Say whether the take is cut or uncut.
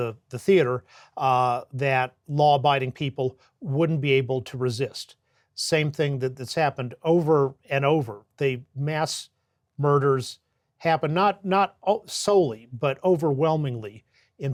uncut